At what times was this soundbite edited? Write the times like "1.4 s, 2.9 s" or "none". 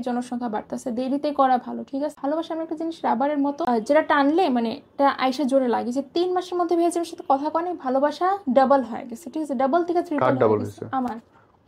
2.1 s, 3.6 s